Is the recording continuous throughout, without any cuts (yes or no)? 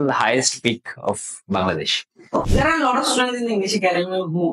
no